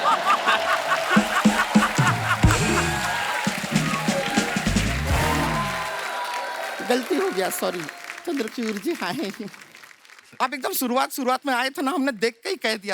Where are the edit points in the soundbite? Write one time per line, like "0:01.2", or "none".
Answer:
none